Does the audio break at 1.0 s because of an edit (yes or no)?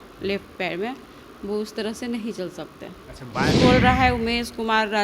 no